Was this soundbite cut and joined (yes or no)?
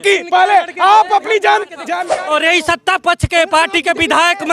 yes